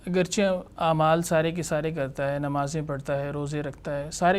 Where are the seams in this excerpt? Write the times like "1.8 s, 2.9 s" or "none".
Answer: none